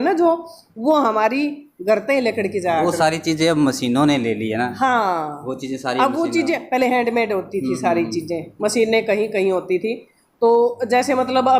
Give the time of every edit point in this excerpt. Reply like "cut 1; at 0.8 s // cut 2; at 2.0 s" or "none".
none